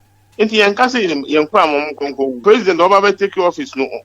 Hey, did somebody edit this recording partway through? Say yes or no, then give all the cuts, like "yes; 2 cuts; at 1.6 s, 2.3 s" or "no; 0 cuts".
yes; 1 cut; at 2.4 s